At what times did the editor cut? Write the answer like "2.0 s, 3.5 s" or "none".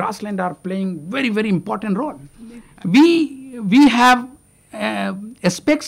2.6 s